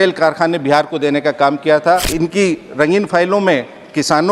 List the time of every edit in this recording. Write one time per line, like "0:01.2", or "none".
0:02.1